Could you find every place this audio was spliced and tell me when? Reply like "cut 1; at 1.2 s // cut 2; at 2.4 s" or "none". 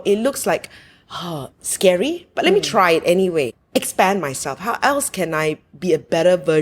cut 1; at 3.6 s